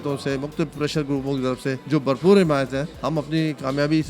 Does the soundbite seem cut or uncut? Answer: cut